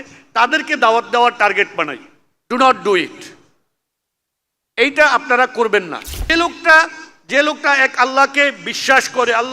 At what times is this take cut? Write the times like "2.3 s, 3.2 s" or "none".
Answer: 6.3 s